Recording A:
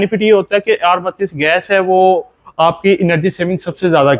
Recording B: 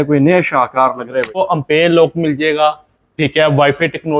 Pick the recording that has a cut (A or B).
B